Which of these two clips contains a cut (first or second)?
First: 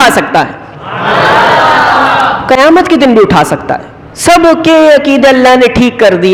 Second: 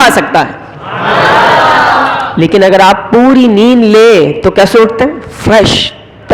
second